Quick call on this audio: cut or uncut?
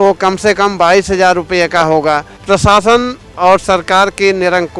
cut